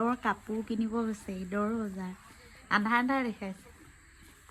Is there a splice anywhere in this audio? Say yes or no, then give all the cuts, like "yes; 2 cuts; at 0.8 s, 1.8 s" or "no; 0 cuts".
no; 0 cuts